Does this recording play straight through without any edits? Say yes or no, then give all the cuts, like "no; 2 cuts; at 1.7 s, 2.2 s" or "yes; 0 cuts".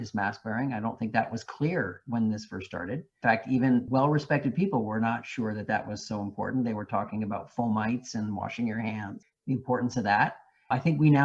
yes; 0 cuts